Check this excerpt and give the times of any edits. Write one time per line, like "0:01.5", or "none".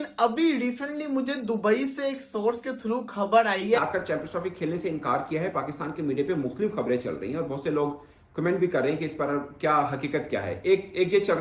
0:03.8